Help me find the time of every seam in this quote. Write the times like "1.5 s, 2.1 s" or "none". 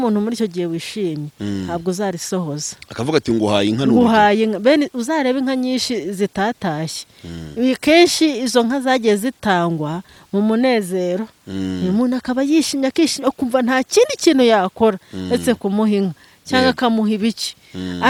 none